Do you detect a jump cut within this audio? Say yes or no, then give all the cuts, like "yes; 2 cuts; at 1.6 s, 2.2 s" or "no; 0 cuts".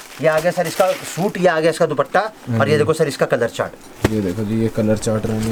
no; 0 cuts